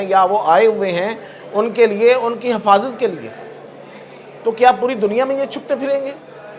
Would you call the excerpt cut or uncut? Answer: uncut